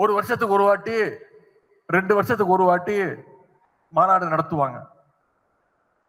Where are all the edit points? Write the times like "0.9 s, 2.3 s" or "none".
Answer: none

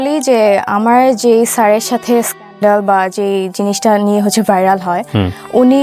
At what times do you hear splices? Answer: none

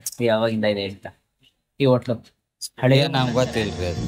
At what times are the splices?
none

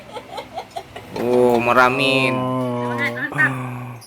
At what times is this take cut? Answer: 2.2 s

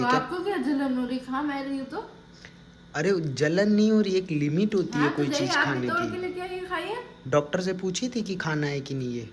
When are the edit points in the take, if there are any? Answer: none

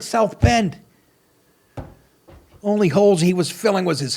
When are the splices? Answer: none

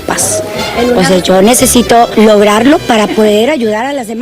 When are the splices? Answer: 2.1 s

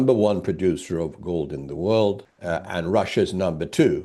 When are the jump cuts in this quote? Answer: 2.3 s

